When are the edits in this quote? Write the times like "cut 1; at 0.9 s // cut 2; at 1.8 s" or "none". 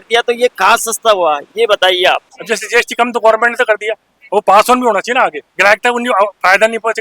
cut 1; at 2.3 s // cut 2; at 5.4 s